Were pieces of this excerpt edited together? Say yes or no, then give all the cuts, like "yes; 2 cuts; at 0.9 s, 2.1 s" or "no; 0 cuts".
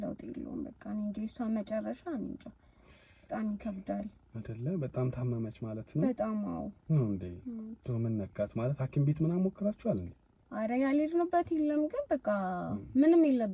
no; 0 cuts